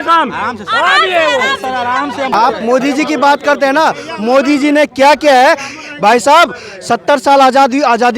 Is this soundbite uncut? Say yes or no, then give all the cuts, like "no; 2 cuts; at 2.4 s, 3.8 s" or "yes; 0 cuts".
no; 1 cut; at 2.3 s